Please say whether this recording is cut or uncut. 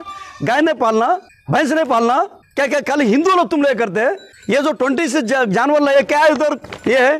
cut